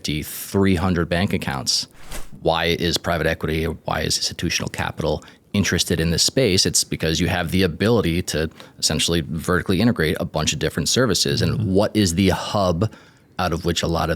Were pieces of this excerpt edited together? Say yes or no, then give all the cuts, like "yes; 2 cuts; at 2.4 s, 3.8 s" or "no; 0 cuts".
yes; 1 cut; at 2.2 s